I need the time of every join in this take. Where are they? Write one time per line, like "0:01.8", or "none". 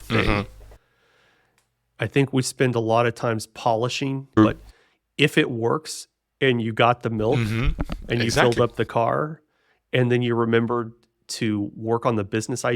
0:04.4